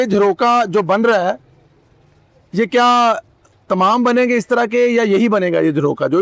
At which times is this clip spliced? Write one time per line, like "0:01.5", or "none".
none